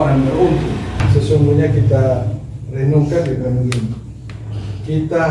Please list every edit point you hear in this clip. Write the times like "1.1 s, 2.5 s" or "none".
0.9 s